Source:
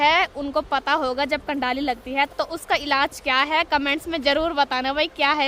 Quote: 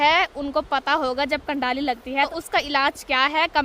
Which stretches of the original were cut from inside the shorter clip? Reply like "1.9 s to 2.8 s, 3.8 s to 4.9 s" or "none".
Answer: 2.3 s to 2.5 s